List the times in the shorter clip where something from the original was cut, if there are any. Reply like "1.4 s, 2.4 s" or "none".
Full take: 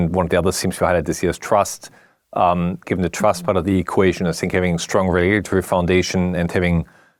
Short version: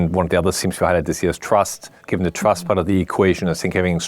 2.0 s